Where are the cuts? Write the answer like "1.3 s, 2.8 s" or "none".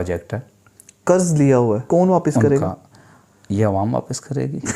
1.8 s